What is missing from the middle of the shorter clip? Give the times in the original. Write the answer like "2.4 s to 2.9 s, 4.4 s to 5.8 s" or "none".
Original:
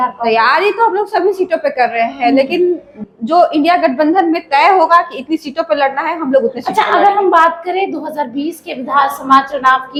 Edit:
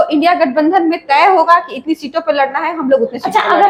none